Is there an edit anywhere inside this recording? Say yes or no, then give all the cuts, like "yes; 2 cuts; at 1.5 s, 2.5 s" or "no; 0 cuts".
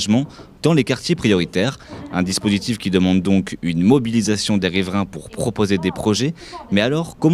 yes; 1 cut; at 1.0 s